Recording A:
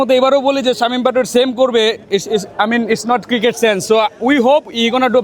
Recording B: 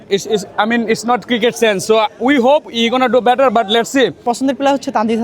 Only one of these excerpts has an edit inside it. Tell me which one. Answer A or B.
B